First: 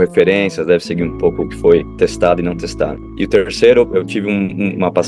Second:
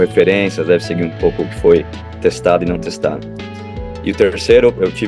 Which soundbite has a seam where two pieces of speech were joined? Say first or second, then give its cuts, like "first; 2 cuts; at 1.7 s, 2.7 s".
first; 2 cuts; at 1.9 s, 3.0 s